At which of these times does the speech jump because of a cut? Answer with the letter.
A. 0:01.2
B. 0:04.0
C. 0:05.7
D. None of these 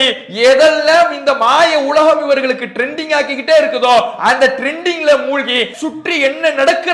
C